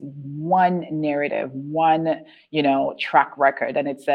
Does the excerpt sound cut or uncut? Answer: uncut